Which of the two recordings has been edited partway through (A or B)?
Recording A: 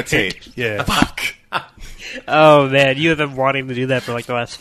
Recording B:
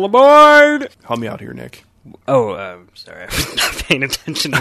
B